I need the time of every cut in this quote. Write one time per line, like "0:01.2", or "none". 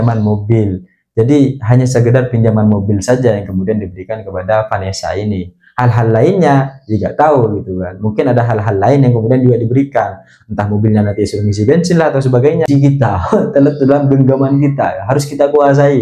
0:12.7